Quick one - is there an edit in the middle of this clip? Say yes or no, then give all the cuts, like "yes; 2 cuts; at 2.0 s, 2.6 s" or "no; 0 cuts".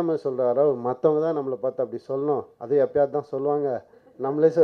no; 0 cuts